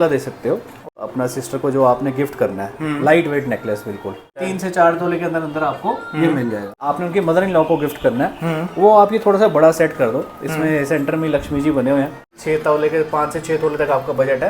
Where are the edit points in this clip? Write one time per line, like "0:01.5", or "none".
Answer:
0:01.0
0:04.4
0:06.8
0:12.3